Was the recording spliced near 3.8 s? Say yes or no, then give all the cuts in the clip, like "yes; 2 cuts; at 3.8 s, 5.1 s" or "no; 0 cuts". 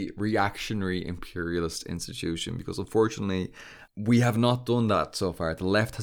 yes; 1 cut; at 3.8 s